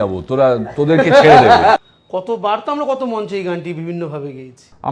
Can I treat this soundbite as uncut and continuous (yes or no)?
yes